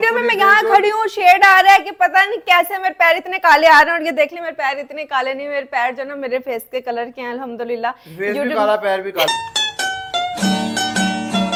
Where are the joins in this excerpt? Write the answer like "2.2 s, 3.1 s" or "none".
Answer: none

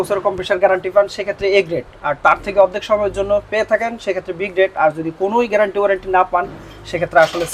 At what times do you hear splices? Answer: none

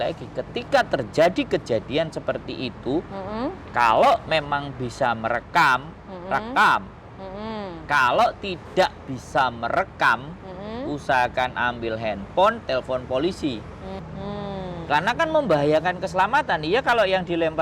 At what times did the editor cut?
14.0 s

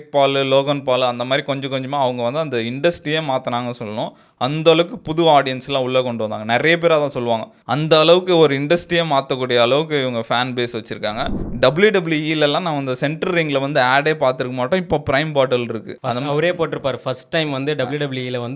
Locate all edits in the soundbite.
7.6 s, 11.4 s

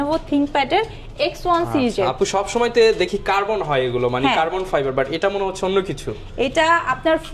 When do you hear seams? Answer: none

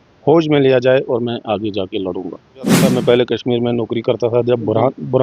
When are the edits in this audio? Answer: 2.8 s

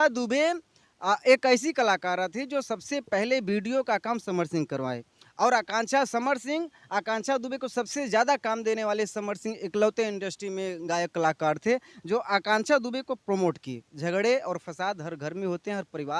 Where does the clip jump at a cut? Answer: none

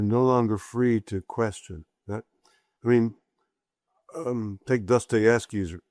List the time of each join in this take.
none

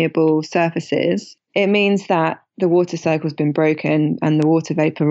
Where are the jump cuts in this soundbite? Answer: 1.4 s

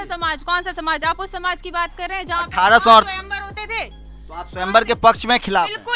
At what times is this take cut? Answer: 4.0 s

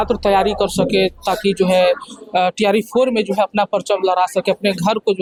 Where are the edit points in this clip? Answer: none

